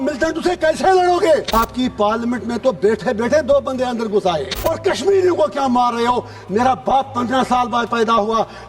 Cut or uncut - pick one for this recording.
cut